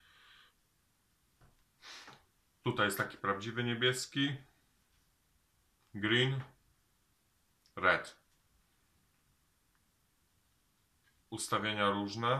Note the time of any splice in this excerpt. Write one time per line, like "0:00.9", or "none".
none